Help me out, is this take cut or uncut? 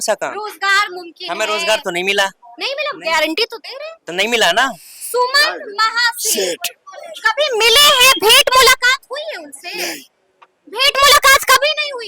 cut